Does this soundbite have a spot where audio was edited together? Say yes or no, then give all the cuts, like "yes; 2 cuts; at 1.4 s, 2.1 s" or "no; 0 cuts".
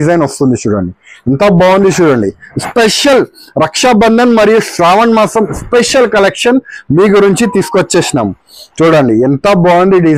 no; 0 cuts